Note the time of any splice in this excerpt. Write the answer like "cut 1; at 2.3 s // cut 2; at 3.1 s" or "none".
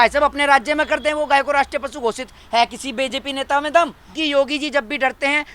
cut 1; at 4.1 s